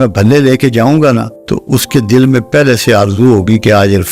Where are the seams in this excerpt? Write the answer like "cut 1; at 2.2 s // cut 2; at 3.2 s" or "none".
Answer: cut 1; at 1.4 s